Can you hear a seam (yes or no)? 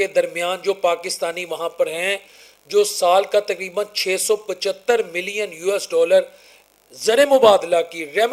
no